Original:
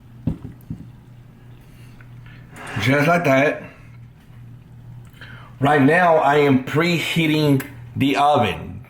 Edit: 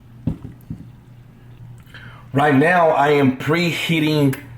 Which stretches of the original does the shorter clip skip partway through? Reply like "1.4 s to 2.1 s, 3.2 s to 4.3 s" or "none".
1.6 s to 4.9 s